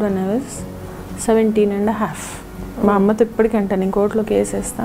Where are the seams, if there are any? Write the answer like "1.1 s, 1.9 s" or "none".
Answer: none